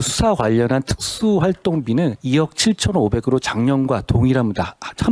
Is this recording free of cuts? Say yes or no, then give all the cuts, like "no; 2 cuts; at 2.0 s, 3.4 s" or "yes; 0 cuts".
no; 1 cut; at 2.2 s